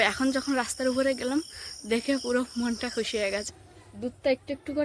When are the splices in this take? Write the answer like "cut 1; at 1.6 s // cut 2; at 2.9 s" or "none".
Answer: cut 1; at 3.5 s